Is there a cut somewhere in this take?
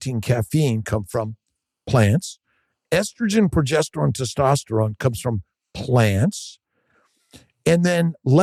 no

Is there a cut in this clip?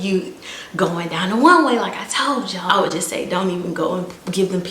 yes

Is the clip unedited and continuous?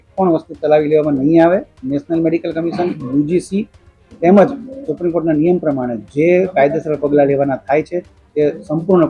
yes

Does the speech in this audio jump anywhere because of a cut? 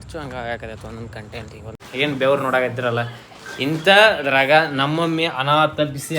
yes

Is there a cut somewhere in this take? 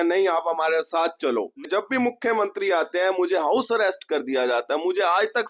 yes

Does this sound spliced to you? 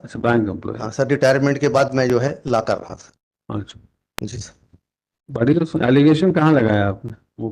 no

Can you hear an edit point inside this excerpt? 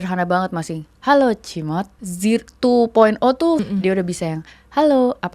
yes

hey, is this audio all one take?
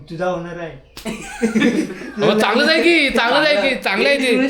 yes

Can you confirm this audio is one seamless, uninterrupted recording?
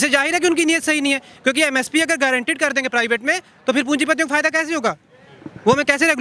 yes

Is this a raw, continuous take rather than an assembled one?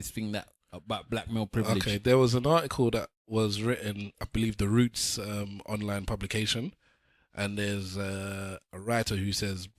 no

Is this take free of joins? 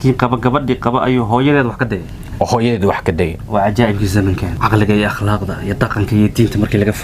no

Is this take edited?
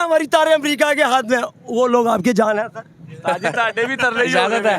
no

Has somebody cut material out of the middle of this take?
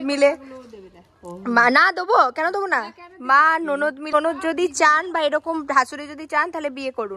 yes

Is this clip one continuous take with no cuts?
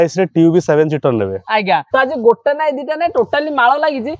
no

